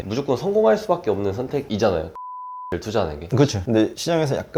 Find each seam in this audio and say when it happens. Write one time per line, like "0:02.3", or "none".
0:03.6